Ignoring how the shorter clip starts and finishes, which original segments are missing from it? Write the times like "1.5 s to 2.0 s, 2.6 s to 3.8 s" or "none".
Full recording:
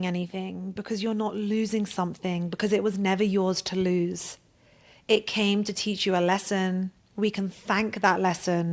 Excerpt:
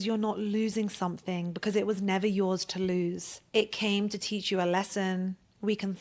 4.3 s to 4.9 s